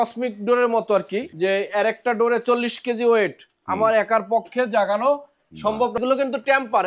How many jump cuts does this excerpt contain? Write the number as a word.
two